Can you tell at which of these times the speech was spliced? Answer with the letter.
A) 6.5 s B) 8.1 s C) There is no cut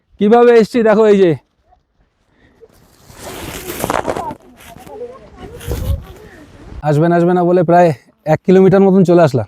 A